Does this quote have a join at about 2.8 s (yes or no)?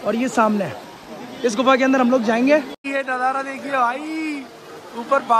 yes